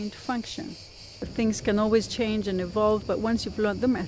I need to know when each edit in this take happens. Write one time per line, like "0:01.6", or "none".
0:01.3